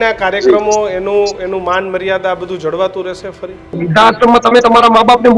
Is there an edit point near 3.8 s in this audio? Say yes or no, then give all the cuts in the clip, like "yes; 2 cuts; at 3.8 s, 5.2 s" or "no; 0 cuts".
yes; 1 cut; at 3.8 s